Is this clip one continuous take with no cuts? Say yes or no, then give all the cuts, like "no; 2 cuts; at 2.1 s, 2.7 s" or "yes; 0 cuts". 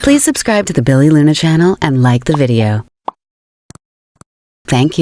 no; 1 cut; at 4.0 s